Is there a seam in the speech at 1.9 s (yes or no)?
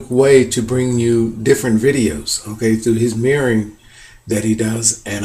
yes